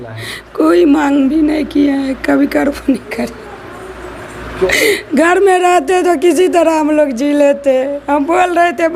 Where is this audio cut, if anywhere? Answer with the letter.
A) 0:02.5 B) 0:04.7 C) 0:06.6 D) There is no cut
B